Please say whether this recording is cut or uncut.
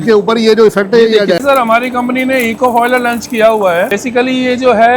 cut